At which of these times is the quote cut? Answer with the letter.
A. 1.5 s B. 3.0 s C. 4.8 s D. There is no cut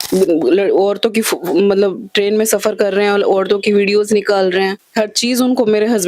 C